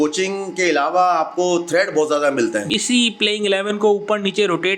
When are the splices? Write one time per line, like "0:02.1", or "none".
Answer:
0:02.7

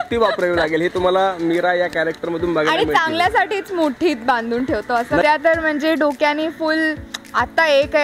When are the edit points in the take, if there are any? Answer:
0:05.2

